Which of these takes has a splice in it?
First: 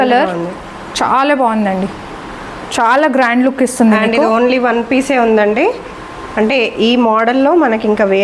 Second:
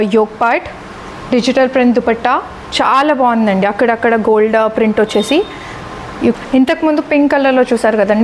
second; 1 cut; at 6.3 s

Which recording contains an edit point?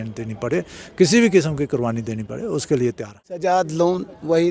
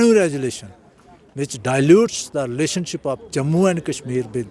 first; 1 cut; at 3.4 s

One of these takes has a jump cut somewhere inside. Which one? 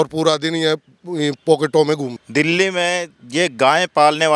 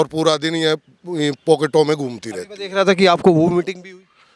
first; 1 cut; at 2.2 s

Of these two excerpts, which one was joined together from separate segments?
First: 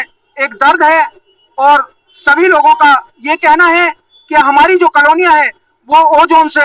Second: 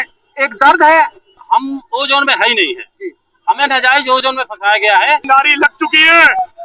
second; 2 cuts; at 1.4 s, 5.2 s

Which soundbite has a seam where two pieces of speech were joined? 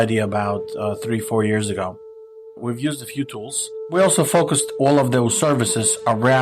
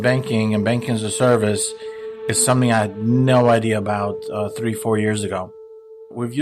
first; 1 cut; at 3.9 s

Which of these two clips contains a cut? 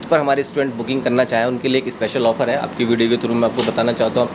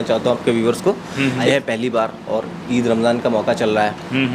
second; 1 cut; at 1.5 s

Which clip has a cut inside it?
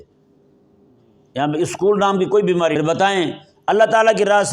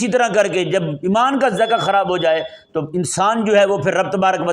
first; 1 cut; at 2.7 s

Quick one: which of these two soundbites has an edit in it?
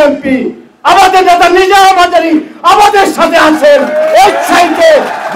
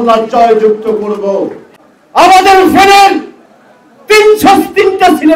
second; 1 cut; at 1.6 s

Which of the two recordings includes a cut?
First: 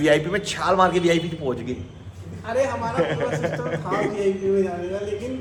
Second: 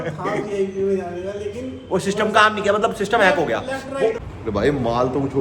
second; 1 cut; at 4.2 s

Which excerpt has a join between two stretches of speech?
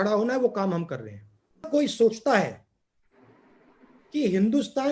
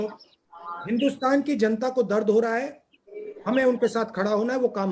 first; 1 cut; at 1.7 s

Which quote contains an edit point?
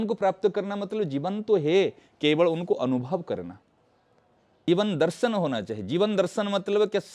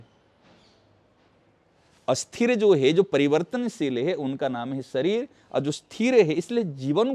first; 1 cut; at 4.7 s

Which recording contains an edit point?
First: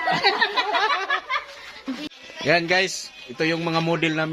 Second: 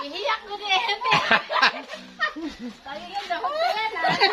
first; 1 cut; at 2.1 s

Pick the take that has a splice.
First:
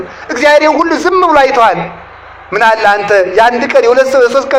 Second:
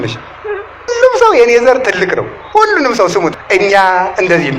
second; 2 cuts; at 0.9 s, 3.3 s

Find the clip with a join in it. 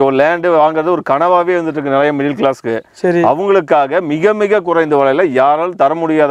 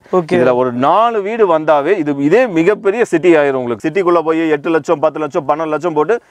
second; 1 cut; at 3.8 s

